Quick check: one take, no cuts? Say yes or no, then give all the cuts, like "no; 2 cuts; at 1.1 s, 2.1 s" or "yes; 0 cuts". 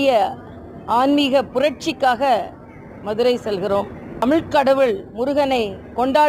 no; 1 cut; at 4.2 s